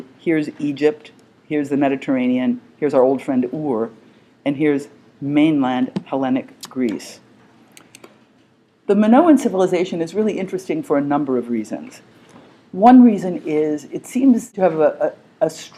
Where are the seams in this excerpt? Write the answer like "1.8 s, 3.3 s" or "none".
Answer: 12.7 s